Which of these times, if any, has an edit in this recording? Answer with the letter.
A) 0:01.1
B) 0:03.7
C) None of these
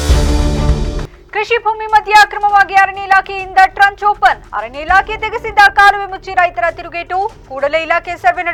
C